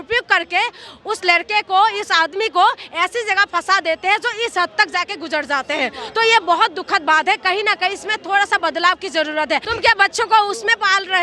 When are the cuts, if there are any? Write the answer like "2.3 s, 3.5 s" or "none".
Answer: 9.7 s